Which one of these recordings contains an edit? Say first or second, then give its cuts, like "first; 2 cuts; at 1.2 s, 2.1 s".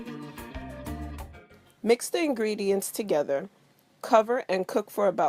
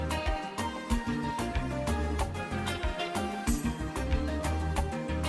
first; 2 cuts; at 1.1 s, 2.0 s